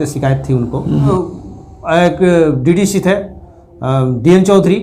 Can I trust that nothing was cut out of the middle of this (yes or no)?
no